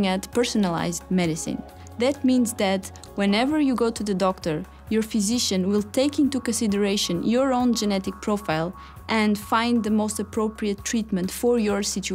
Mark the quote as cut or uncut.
uncut